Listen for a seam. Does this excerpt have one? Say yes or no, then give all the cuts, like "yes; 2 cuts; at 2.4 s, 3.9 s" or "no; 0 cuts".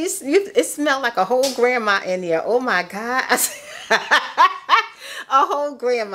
no; 0 cuts